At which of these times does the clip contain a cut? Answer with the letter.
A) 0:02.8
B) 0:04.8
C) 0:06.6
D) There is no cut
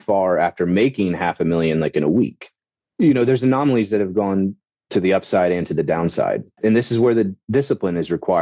C